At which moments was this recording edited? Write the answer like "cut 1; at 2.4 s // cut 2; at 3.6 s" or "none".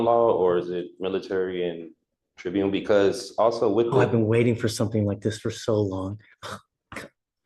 cut 1; at 2.4 s